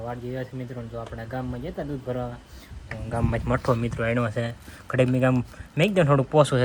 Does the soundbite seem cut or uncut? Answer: uncut